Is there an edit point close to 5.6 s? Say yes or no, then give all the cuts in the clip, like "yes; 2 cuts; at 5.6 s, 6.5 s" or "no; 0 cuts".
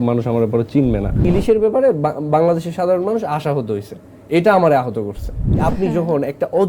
yes; 2 cuts; at 1.2 s, 5.6 s